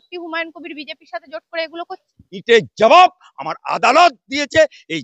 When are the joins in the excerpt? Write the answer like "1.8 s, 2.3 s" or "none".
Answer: 2.3 s